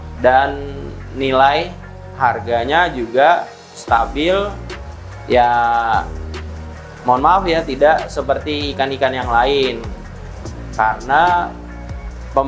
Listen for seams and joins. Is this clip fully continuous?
yes; 0 cuts

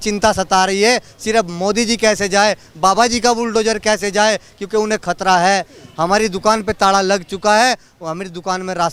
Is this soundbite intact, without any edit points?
yes; 0 cuts

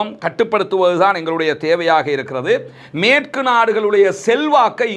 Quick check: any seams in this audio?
no; 0 cuts

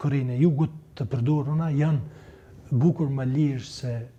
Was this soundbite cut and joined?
no; 0 cuts

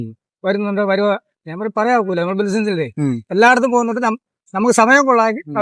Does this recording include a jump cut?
no; 0 cuts

